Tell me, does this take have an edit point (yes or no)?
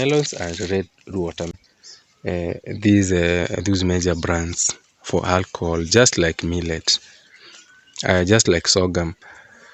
yes